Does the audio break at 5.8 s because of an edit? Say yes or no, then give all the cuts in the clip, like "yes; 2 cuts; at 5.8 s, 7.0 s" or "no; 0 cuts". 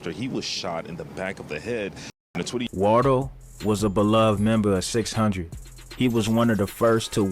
no; 1 cut; at 2.7 s